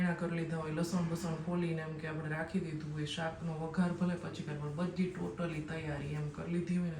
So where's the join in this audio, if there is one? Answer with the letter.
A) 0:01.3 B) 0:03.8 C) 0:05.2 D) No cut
D